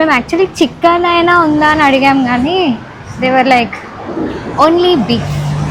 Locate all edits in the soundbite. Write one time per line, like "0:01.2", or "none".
none

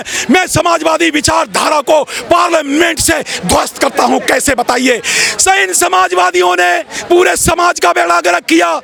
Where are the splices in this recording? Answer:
none

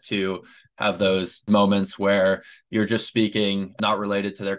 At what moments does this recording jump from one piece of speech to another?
0:01.4
0:03.7

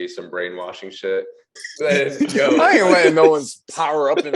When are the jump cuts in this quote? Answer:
0:01.6

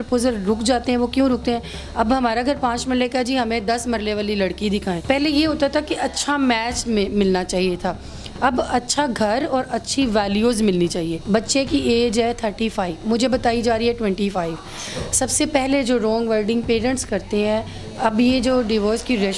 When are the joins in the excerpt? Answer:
0:05.0
0:11.1

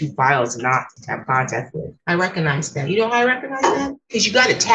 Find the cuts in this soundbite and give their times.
0:01.9

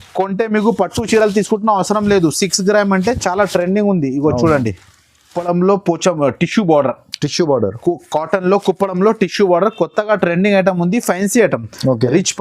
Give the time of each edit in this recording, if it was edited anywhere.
0:05.4

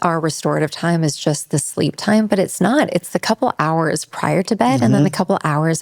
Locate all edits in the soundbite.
none

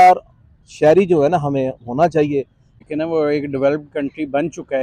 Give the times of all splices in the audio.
0:02.8

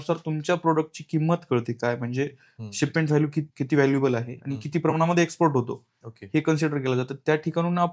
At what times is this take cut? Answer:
0:03.5

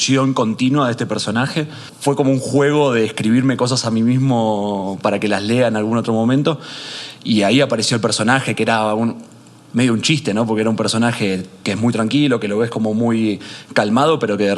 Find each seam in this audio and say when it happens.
0:01.8

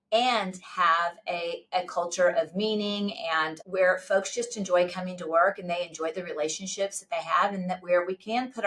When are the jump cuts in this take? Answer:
0:03.6

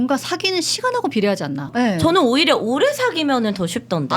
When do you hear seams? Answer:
0:01.7

